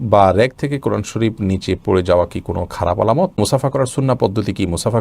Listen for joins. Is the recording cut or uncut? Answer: cut